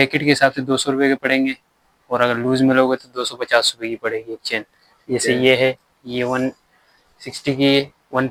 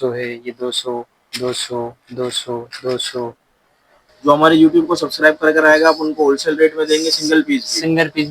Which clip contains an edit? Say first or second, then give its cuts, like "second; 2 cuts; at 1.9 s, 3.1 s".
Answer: second; 1 cut; at 4.1 s